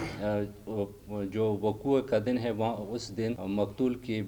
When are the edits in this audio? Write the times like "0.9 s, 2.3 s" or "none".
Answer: 1.0 s, 3.4 s